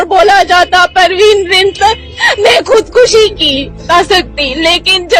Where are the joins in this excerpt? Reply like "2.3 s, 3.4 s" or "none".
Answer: 3.9 s